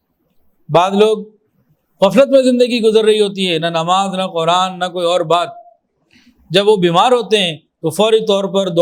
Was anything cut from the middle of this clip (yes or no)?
no